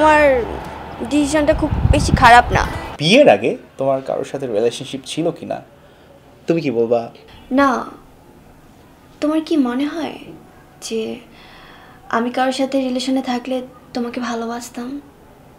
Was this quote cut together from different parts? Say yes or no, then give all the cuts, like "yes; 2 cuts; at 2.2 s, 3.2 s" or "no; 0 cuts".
yes; 1 cut; at 2.8 s